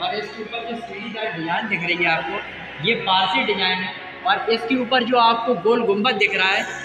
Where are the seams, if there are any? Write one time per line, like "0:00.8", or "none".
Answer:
none

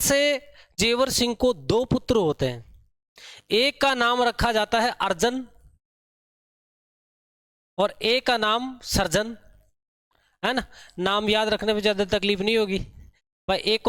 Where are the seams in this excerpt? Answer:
none

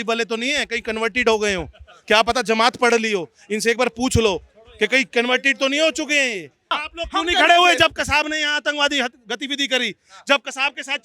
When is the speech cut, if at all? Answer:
0:06.6

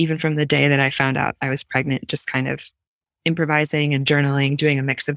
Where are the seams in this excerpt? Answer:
none

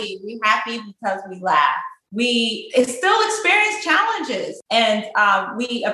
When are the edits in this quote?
0:01.9
0:04.5

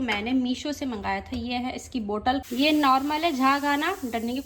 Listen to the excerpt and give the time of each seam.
0:02.5

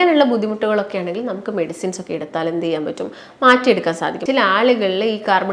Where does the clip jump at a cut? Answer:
0:04.2

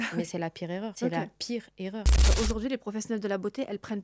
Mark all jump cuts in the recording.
0:00.9
0:02.3

